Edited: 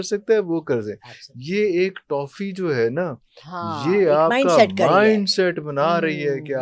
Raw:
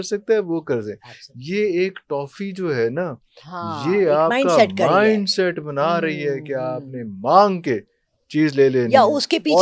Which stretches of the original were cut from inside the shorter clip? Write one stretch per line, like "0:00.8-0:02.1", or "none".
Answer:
none